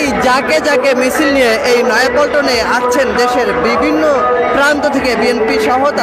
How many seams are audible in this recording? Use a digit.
0